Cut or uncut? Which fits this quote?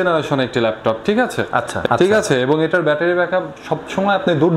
cut